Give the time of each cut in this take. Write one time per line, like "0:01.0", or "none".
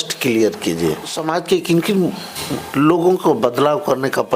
0:01.1